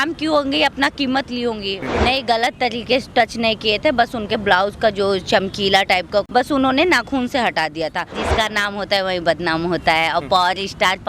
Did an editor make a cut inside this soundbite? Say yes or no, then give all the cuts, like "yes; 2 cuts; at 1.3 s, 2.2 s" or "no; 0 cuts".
yes; 3 cuts; at 1.9 s, 6.3 s, 8.2 s